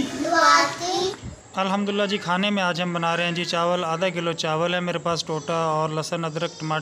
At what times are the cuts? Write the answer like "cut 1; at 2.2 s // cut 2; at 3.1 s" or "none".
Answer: cut 1; at 1.2 s

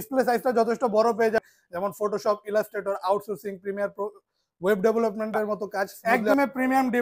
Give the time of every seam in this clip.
cut 1; at 1.4 s // cut 2; at 6.0 s

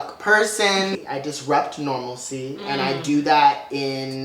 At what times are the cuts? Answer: cut 1; at 0.9 s

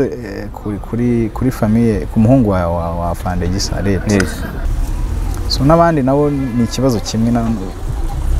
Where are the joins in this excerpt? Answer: cut 1; at 4.7 s

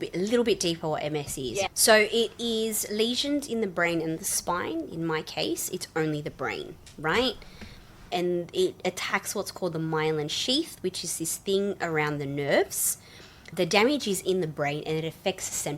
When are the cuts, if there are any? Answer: cut 1; at 1.7 s // cut 2; at 8.1 s // cut 3; at 13.5 s

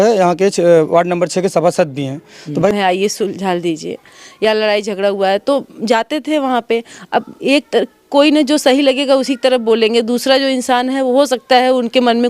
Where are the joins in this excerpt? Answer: cut 1; at 2.7 s

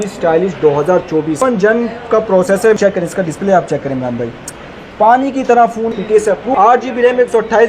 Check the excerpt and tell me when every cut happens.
cut 1; at 1.4 s // cut 2; at 2.8 s // cut 3; at 5.9 s

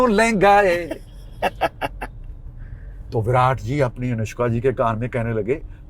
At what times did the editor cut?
none

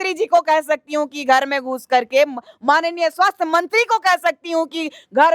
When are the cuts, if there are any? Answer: none

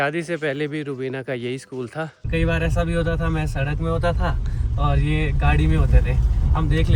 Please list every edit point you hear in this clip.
cut 1; at 2.3 s

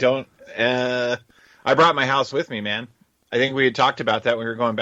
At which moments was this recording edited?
none

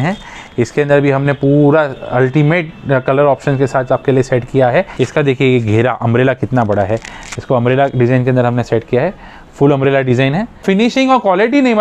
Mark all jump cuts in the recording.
cut 1; at 4.9 s // cut 2; at 10.6 s

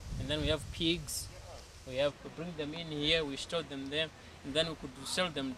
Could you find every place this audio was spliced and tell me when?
cut 1; at 2.2 s

